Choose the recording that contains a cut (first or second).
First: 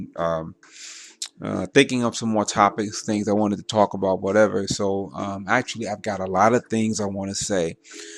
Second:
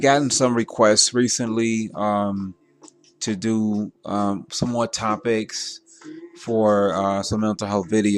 second